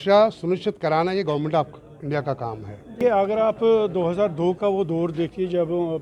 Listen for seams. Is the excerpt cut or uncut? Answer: cut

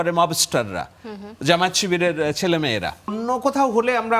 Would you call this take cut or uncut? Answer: cut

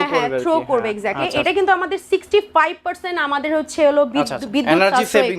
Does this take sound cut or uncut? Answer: cut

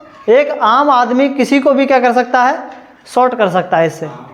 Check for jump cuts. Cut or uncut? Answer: uncut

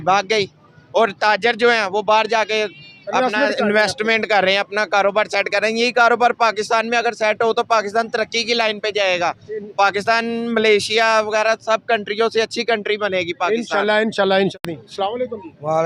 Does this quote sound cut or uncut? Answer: uncut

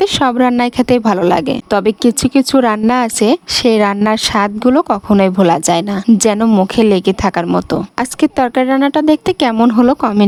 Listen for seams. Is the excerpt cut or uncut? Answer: uncut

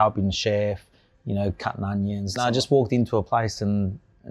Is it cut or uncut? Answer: cut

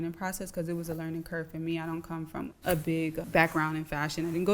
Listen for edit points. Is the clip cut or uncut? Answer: cut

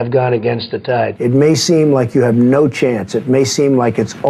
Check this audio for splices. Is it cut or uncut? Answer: cut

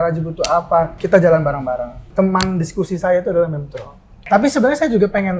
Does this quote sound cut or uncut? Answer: cut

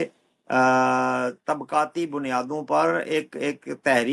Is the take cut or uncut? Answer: uncut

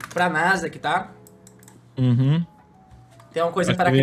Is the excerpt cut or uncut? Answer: uncut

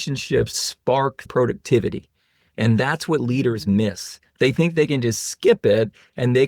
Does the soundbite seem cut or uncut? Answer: cut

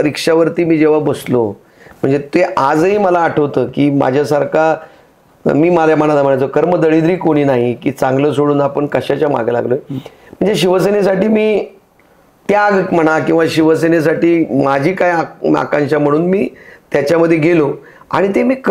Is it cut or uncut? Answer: uncut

